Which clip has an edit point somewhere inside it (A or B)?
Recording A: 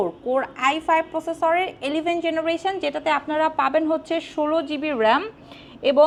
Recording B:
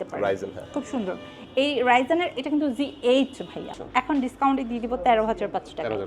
B